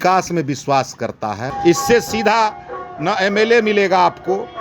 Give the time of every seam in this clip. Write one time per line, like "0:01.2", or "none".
0:01.5